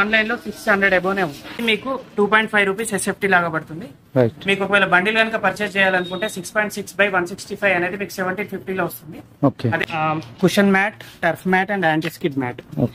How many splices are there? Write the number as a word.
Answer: two